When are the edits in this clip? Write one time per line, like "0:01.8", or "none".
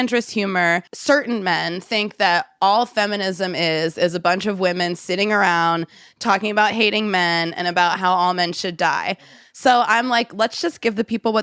0:00.9